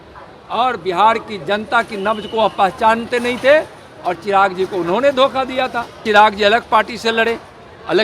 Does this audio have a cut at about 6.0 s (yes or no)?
yes